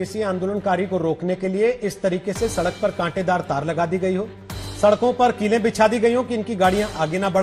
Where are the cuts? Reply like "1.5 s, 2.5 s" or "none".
none